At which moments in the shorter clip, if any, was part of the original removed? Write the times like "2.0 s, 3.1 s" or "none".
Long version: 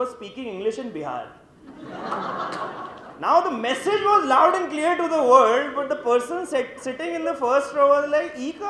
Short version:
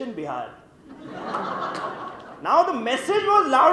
none